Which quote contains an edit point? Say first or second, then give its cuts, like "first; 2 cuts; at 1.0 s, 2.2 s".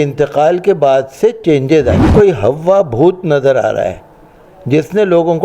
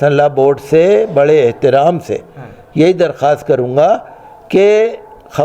first; 1 cut; at 2.0 s